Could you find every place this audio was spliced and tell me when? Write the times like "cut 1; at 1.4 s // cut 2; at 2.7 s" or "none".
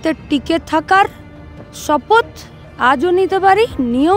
none

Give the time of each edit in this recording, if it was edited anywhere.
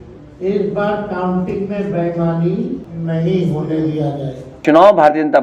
cut 1; at 2.9 s // cut 2; at 4.5 s

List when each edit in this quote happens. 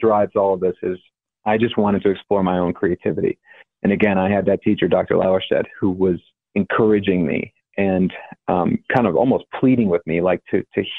cut 1; at 6.3 s

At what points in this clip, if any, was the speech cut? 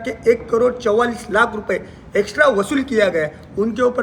none

